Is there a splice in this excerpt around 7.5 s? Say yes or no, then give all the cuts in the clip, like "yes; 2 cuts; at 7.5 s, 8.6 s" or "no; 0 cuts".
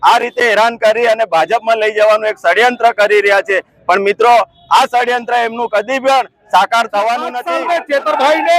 yes; 1 cut; at 7.5 s